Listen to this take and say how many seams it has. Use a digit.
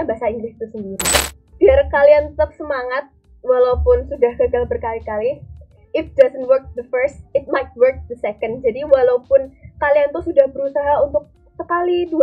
1